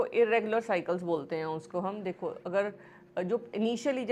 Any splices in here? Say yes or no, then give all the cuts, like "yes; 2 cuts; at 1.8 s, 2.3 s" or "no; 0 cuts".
no; 0 cuts